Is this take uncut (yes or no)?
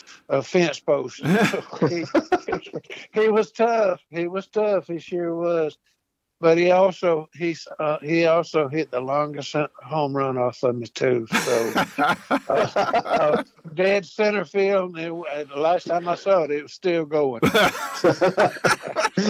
yes